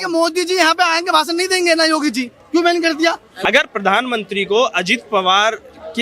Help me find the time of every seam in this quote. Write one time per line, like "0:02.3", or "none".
0:03.3